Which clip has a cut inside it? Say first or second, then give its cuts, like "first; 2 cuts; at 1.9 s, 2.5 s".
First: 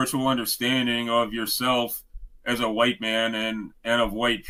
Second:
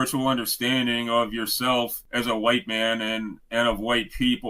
second; 1 cut; at 2.0 s